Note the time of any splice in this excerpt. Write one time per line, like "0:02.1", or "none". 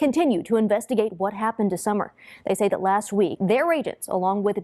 0:03.3